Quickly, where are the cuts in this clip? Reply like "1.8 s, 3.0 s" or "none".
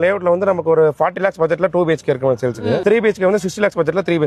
2.8 s